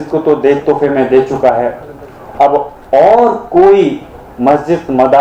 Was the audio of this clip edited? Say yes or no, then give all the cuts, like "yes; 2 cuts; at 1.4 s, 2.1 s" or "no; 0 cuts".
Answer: no; 0 cuts